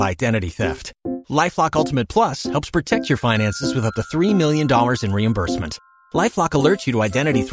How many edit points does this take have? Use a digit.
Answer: 0